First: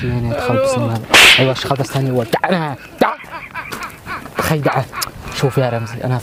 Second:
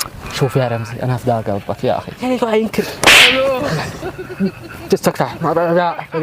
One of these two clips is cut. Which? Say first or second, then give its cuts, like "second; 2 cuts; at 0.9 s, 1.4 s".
second; 1 cut; at 2.2 s